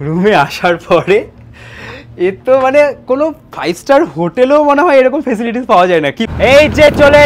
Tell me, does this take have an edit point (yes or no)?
yes